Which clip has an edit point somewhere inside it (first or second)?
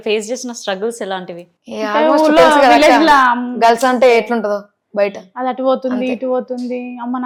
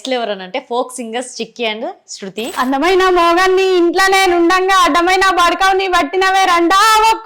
second